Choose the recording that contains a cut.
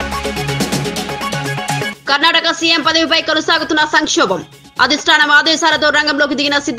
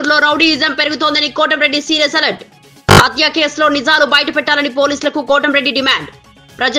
first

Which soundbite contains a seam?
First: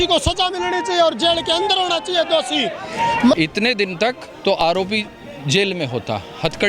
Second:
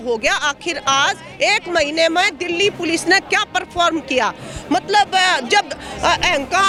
first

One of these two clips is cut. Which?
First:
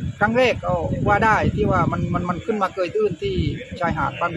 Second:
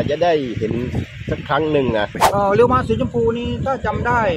second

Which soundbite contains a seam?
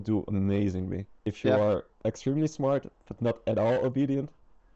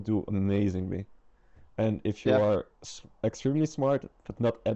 first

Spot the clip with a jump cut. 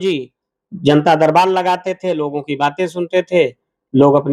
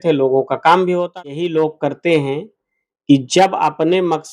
second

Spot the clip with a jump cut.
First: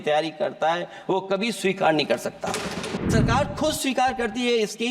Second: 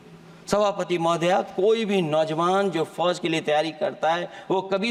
first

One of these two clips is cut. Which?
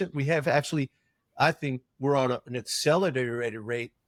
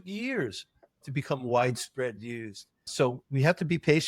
second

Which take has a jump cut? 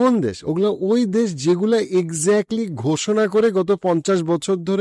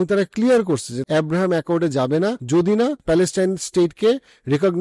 second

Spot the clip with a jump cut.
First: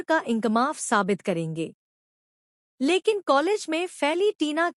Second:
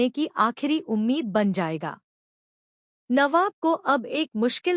second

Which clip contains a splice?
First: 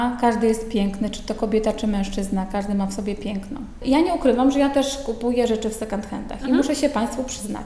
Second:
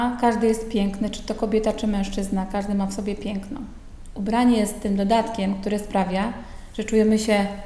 first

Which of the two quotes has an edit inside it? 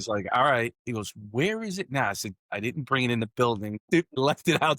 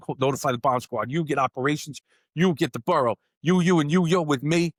first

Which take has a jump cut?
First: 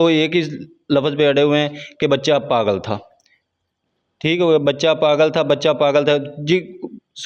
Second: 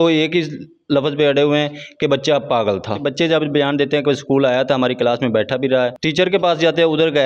second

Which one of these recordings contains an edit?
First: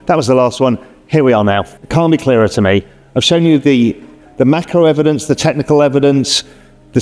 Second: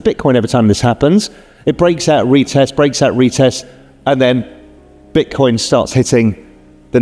first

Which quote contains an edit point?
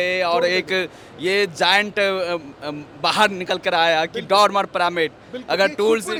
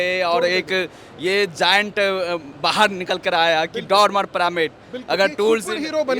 second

